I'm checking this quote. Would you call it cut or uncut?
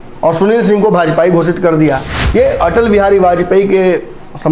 cut